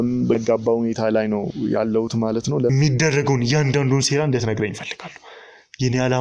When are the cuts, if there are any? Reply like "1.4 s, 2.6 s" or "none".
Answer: 2.7 s